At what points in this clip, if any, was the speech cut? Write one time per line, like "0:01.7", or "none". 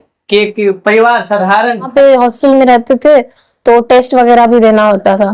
0:01.9